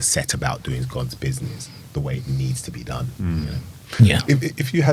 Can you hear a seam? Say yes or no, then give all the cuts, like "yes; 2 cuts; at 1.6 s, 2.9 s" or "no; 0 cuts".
no; 0 cuts